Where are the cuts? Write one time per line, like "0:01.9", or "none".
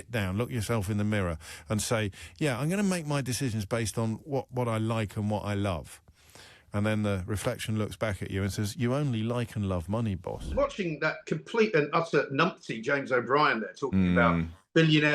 0:10.5